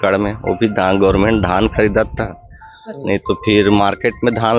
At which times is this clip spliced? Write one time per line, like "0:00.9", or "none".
none